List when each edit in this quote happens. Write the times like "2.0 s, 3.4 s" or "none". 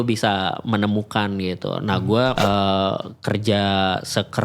2.3 s